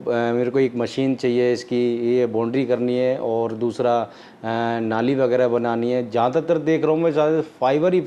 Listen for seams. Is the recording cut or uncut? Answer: uncut